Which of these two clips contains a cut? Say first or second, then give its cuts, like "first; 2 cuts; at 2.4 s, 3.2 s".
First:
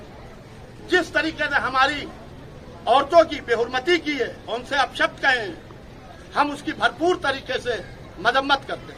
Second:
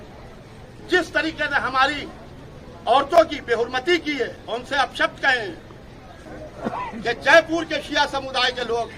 second; 1 cut; at 6.2 s